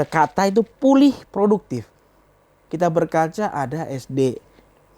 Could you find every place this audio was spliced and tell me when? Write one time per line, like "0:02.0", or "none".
0:02.6